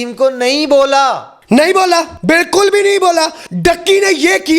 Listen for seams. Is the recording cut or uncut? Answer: cut